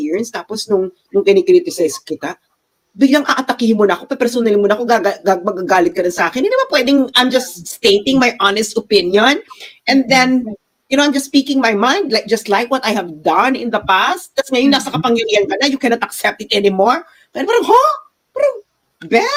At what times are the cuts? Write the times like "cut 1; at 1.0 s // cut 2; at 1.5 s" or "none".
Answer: none